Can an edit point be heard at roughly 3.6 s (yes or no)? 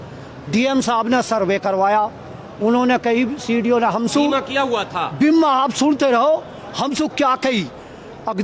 no